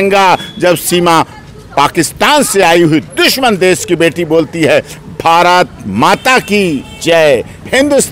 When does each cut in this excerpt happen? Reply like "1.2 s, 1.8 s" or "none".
none